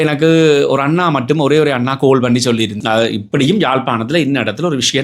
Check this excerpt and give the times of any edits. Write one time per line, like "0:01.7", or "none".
0:02.7